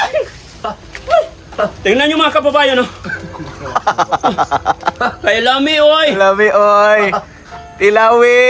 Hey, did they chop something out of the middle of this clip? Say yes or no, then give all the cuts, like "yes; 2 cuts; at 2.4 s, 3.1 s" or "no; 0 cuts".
yes; 1 cut; at 1.5 s